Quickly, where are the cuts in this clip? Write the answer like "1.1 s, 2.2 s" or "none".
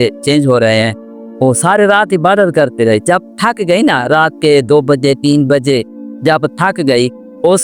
1.4 s